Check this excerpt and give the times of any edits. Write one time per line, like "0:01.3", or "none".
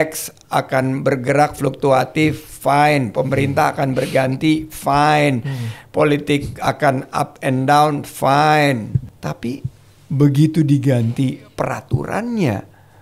0:09.1